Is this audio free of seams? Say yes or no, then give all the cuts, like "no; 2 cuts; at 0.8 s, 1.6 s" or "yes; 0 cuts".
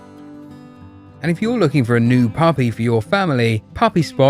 no; 1 cut; at 1.2 s